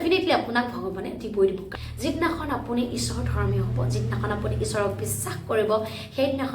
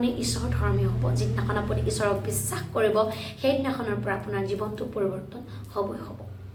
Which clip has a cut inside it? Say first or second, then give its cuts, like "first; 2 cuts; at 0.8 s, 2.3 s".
first; 1 cut; at 1.6 s